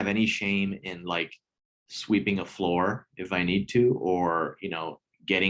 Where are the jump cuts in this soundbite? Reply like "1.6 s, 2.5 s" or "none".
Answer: none